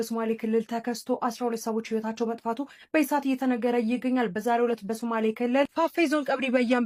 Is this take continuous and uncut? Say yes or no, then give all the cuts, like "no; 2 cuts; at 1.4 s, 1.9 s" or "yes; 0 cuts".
yes; 0 cuts